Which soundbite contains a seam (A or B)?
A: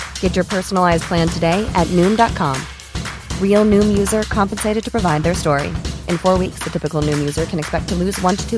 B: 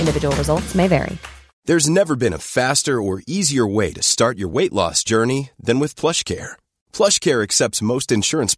B